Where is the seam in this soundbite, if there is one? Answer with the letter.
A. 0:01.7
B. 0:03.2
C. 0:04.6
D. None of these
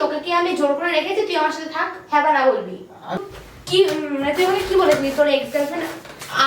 B